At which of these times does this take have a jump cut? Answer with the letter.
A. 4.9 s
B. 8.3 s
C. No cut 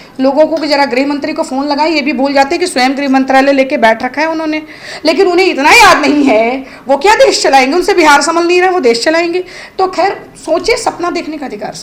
C